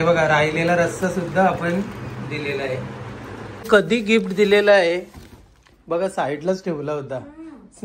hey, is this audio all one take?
no; 1 cut; at 3.7 s

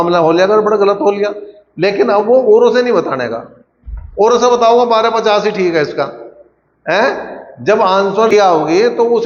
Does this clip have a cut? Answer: yes; 1 cut; at 8.3 s

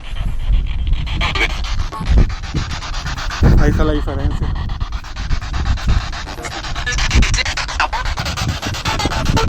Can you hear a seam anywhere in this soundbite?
yes; 1 cut; at 8.2 s

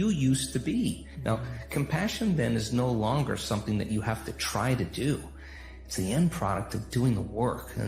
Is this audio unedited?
yes; 0 cuts

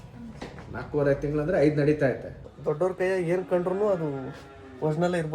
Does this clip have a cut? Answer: yes; 1 cut; at 2.5 s

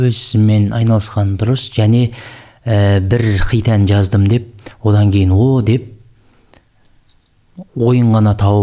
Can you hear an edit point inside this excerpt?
no; 0 cuts

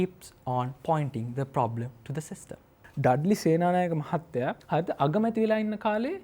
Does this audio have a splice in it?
yes; 2 cuts; at 2.8 s, 4.6 s

